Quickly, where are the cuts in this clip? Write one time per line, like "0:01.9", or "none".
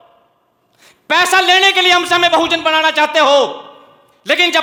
none